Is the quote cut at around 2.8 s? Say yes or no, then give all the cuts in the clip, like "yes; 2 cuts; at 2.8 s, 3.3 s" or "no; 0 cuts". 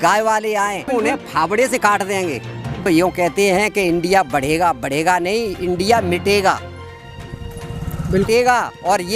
yes; 3 cuts; at 0.9 s, 2.8 s, 8.2 s